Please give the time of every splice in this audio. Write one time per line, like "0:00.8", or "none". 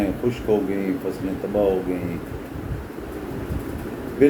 none